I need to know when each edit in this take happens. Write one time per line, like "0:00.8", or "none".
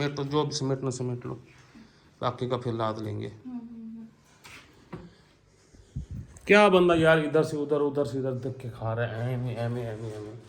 none